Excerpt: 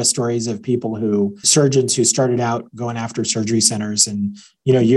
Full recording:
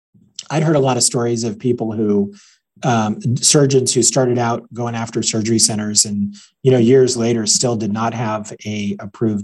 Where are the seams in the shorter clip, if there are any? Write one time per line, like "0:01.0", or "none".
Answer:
0:01.4